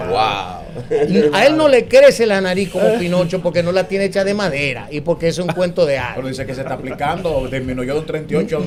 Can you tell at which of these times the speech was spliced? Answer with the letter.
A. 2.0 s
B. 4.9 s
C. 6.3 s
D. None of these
D